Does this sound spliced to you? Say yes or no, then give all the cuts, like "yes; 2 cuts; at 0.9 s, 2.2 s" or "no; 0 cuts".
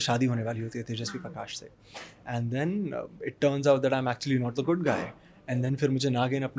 no; 0 cuts